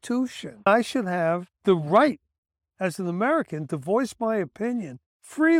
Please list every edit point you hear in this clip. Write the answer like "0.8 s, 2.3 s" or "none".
0.7 s, 1.5 s